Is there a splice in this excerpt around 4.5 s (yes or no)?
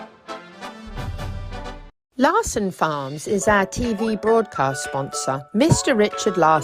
no